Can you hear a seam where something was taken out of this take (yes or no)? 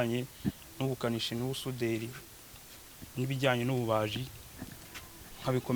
no